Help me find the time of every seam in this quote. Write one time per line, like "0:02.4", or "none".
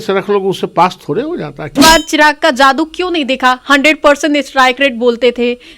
0:01.7